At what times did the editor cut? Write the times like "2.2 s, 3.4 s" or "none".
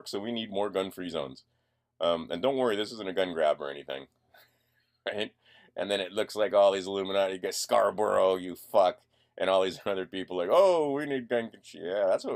none